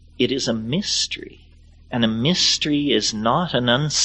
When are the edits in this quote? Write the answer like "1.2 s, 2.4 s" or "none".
none